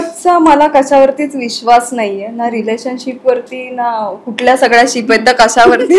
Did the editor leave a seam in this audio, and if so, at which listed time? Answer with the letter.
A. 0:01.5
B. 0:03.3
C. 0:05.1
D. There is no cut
D